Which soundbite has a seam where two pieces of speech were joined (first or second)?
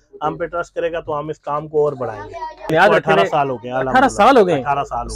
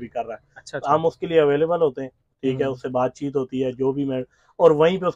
first